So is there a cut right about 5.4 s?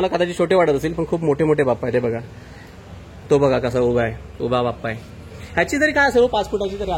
no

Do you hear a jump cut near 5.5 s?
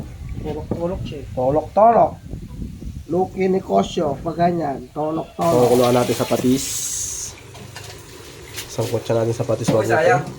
yes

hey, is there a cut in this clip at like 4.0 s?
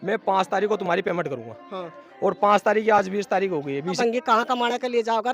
yes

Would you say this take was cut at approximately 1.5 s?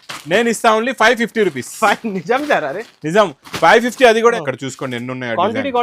no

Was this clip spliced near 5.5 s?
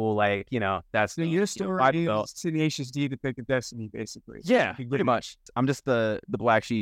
yes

